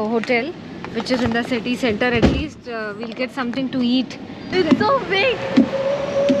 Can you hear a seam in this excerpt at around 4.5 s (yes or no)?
yes